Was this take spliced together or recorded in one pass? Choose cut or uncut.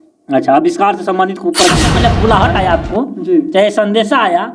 cut